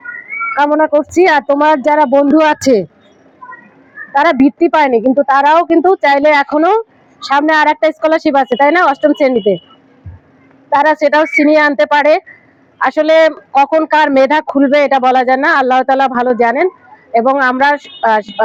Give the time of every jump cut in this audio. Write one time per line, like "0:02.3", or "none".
none